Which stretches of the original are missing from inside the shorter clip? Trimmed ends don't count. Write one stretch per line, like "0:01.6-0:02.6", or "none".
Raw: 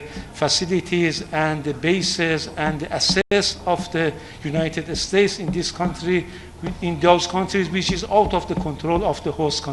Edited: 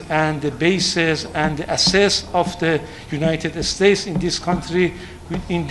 0:03.2-0:03.3

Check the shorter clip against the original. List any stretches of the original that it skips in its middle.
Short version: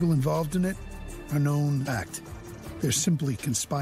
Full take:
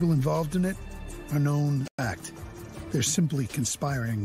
0:01.8-0:02.0

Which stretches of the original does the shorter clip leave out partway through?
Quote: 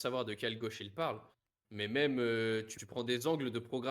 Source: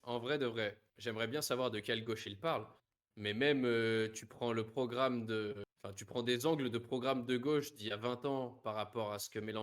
0:04.2-0:06.0

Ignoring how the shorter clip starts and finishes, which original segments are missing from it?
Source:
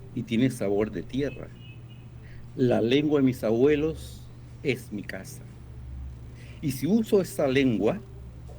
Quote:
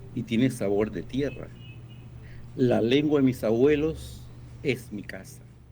none

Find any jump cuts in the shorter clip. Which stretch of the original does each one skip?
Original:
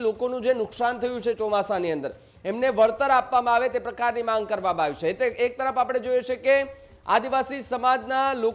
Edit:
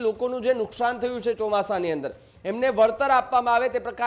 none

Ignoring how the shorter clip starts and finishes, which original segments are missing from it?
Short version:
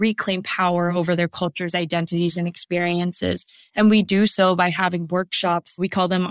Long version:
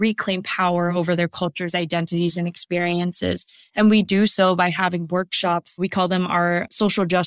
none

